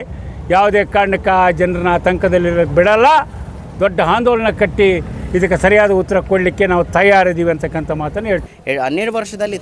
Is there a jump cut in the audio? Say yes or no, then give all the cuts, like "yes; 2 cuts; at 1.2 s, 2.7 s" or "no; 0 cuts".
yes; 1 cut; at 8.5 s